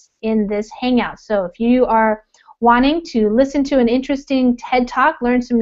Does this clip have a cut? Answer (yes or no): no